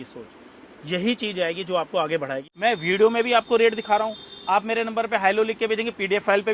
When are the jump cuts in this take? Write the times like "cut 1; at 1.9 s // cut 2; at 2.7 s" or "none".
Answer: cut 1; at 2.4 s